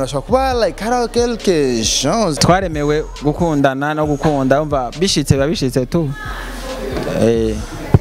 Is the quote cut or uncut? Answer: cut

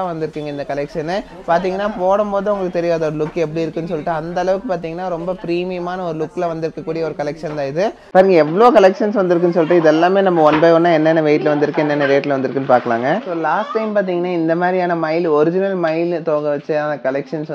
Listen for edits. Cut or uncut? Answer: cut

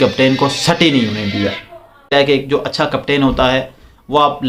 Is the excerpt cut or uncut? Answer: cut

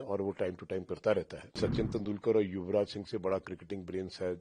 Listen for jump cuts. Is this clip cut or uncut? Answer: cut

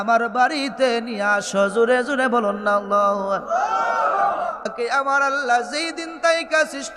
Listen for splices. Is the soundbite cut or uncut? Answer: cut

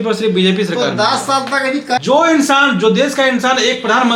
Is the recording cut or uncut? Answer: cut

